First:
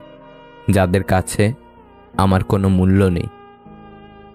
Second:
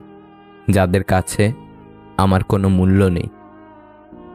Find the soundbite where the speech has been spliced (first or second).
first